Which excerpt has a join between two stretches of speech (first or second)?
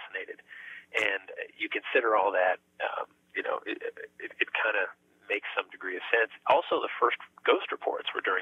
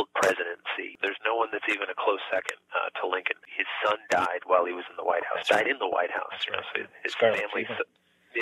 second